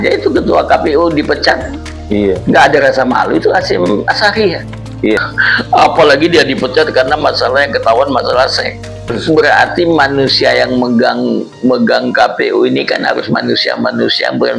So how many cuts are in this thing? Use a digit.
2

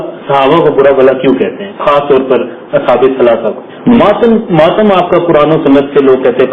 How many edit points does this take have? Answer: 1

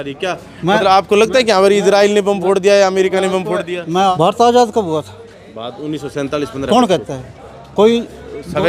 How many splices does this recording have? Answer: 1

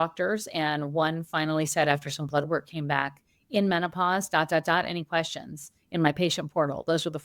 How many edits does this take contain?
0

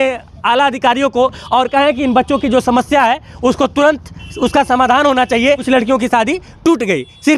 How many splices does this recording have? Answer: 1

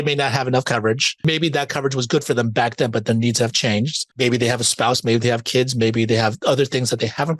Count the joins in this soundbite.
2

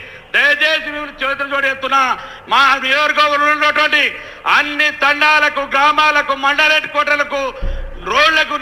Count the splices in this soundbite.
0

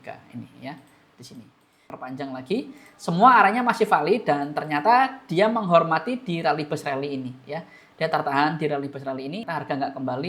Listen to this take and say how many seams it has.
2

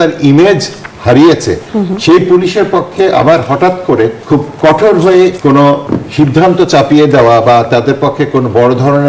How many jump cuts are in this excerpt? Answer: 2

